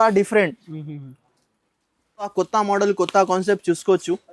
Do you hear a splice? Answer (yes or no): yes